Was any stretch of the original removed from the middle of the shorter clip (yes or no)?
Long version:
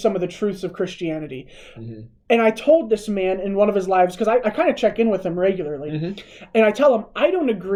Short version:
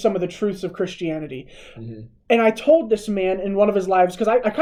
no